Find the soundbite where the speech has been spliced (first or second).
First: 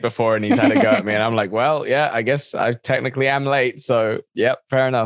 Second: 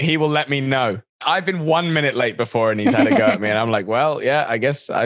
second